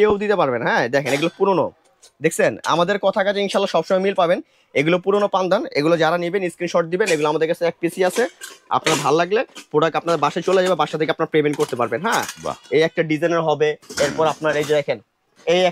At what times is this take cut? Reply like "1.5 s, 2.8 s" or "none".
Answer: none